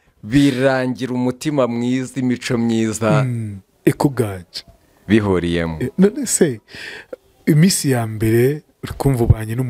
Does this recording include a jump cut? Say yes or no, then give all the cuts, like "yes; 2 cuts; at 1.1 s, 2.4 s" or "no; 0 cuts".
no; 0 cuts